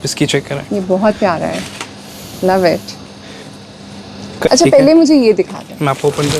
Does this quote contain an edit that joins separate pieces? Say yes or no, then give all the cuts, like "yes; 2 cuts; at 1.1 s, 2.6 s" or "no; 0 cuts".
yes; 1 cut; at 4.5 s